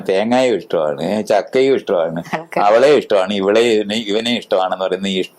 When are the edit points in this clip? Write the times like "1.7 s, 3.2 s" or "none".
none